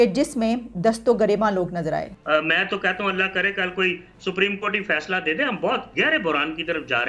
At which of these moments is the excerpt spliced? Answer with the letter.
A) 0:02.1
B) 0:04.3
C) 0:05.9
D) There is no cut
A